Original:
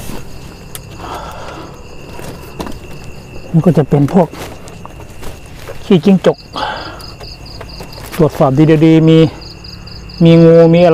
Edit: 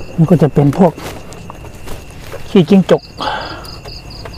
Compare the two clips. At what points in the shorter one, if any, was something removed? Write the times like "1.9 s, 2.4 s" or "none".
none